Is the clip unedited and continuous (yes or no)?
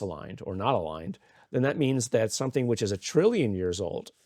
yes